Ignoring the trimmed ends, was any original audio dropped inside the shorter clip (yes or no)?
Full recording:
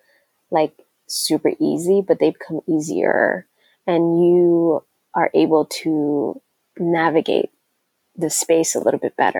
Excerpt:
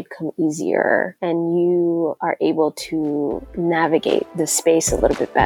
yes